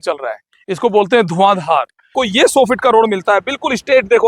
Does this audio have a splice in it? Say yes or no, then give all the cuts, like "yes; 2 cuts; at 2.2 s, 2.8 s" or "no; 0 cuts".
yes; 1 cut; at 2.1 s